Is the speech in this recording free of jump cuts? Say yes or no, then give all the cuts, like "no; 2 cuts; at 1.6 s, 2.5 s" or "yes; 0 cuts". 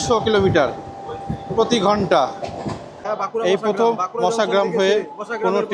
no; 1 cut; at 2.9 s